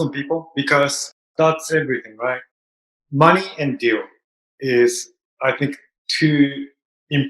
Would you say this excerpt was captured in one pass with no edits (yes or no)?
no